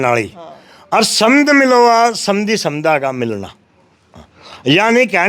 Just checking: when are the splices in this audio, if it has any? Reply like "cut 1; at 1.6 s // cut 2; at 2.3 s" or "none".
none

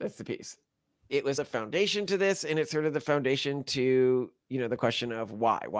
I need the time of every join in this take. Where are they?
cut 1; at 1.4 s

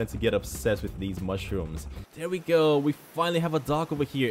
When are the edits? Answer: cut 1; at 2.0 s

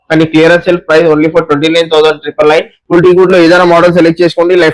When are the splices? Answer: cut 1; at 2.8 s

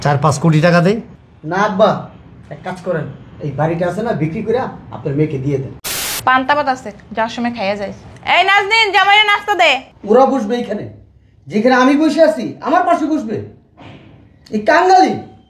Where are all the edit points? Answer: cut 1; at 5.8 s // cut 2; at 9.9 s

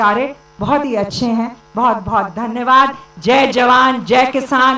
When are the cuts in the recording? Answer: none

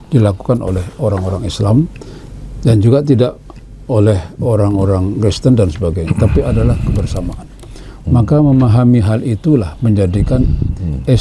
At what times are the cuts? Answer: none

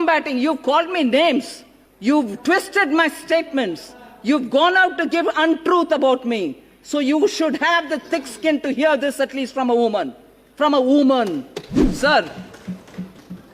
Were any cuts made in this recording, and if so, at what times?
none

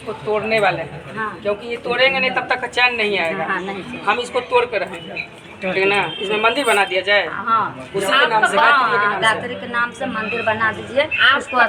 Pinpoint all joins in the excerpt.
none

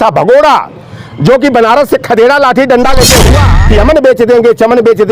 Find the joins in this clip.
cut 1; at 3.5 s

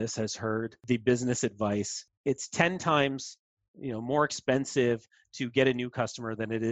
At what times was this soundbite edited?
cut 1; at 0.8 s // cut 2; at 2.0 s

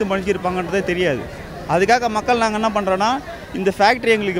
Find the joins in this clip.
none

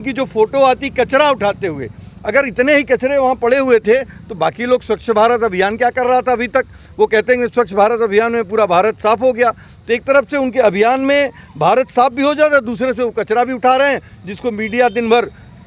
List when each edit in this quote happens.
none

